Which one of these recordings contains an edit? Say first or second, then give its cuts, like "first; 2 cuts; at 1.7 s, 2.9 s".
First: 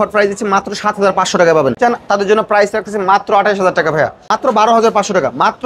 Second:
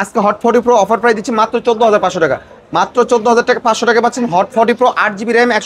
first; 2 cuts; at 1.8 s, 4.2 s